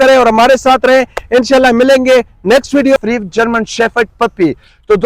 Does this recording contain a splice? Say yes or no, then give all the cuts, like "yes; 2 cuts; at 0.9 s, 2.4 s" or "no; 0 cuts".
yes; 1 cut; at 3.0 s